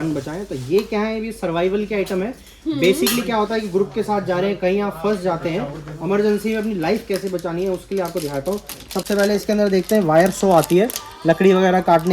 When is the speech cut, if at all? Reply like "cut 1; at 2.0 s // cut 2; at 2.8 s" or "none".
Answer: none

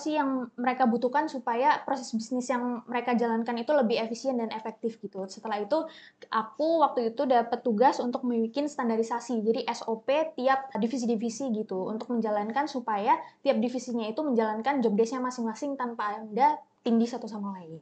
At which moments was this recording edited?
cut 1; at 10.8 s // cut 2; at 16.7 s

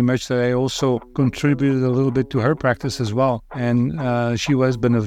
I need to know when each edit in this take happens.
cut 1; at 1.1 s // cut 2; at 3.5 s

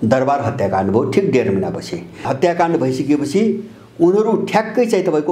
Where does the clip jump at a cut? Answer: cut 1; at 2.3 s

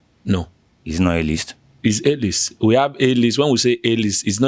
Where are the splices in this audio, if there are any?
none

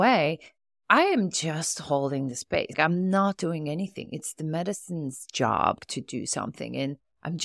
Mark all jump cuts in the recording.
cut 1; at 2.7 s // cut 2; at 5.8 s

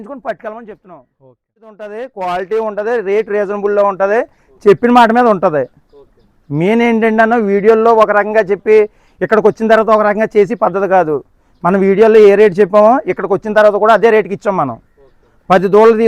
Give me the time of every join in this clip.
cut 1; at 1.9 s

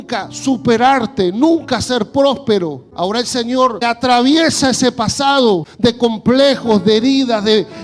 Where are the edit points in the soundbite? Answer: cut 1; at 2.8 s // cut 2; at 3.8 s // cut 3; at 5.7 s

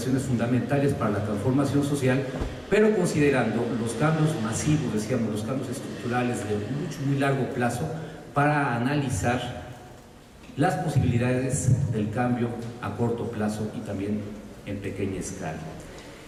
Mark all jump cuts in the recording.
none

